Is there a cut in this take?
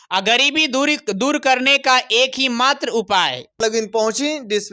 yes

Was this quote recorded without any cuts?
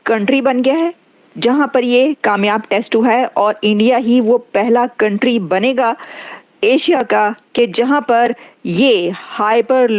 yes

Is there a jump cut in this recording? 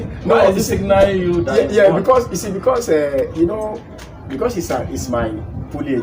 no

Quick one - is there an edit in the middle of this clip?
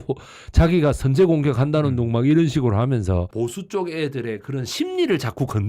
yes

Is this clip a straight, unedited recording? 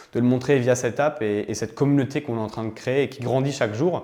yes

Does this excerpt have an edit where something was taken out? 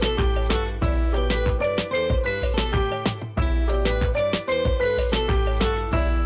no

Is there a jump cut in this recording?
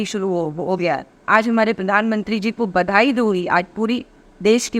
yes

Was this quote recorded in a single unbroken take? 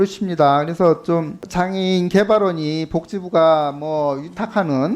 no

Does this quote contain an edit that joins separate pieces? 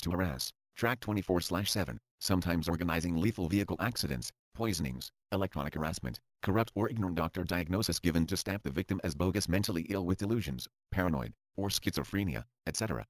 yes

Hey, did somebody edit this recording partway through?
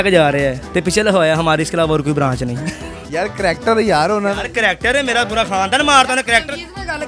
yes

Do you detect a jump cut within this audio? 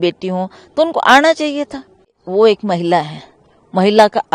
yes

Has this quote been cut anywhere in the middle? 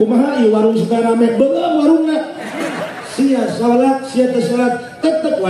yes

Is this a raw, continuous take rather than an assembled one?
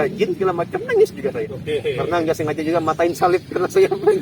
no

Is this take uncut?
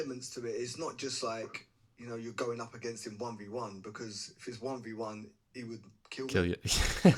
yes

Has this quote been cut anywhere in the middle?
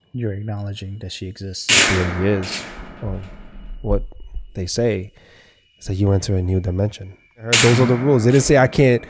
yes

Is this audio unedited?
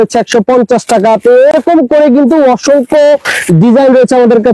yes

